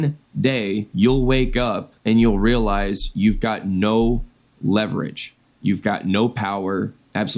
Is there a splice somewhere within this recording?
yes; 2 cuts; at 0.9 s, 1.9 s

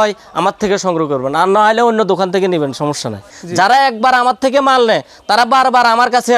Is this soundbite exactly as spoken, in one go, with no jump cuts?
no; 1 cut; at 3.4 s

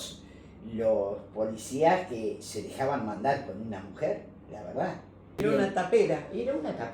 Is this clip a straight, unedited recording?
no; 1 cut; at 5.4 s

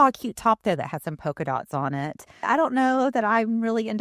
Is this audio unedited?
no; 1 cut; at 2.4 s

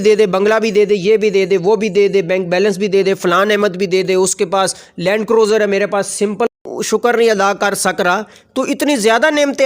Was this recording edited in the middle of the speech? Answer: yes; 1 cut; at 6.5 s

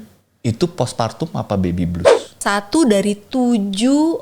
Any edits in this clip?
yes; 1 cut; at 2.4 s

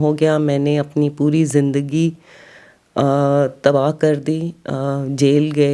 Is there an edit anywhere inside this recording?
no; 0 cuts

